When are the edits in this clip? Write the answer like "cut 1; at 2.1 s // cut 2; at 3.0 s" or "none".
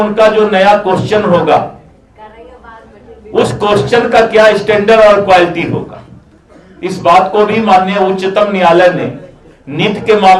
none